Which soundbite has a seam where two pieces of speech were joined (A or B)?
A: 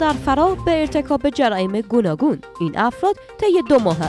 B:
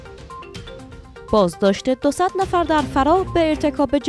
B